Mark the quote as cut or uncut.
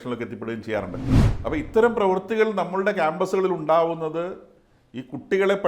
cut